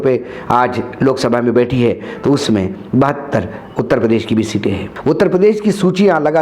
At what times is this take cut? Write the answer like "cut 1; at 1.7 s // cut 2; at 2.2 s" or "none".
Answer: cut 1; at 4.9 s